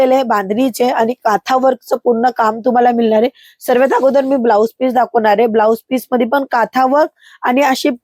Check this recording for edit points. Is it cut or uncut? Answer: uncut